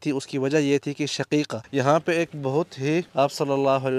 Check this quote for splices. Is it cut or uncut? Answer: cut